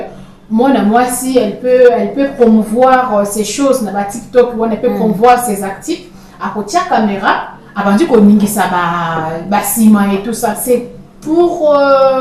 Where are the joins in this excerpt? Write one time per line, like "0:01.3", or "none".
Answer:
none